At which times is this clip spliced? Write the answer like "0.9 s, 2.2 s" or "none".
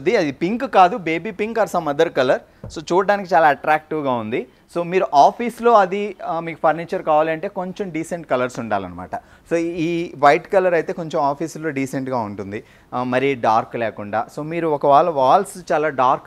none